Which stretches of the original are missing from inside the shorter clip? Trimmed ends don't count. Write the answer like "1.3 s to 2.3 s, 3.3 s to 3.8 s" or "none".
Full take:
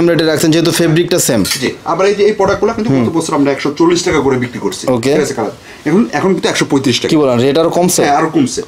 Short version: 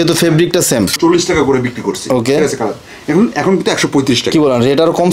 1.5 s to 3.7 s